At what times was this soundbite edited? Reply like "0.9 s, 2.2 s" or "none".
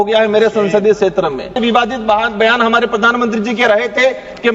1.6 s

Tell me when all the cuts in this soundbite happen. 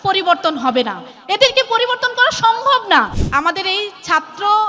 3.2 s

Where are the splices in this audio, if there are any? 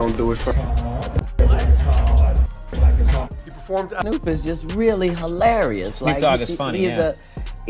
3.9 s

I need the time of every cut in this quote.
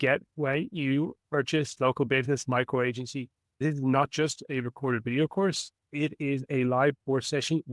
1.7 s, 3.6 s, 6.5 s

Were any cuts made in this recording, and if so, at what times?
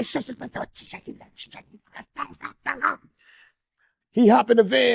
none

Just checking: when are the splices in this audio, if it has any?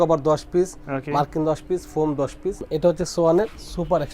2.7 s

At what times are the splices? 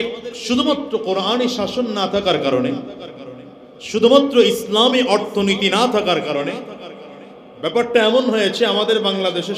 none

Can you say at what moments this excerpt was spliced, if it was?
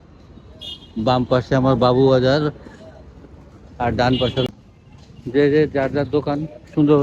4.5 s

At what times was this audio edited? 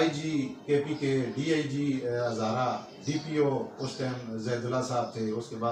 none

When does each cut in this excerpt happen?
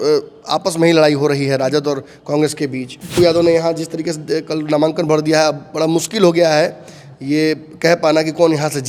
3.0 s

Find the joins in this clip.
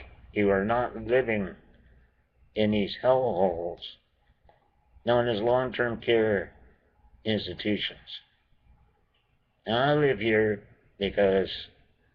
10.6 s

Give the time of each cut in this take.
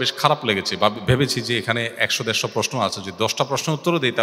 none

